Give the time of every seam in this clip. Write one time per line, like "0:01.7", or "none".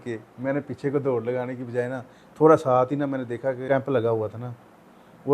0:03.6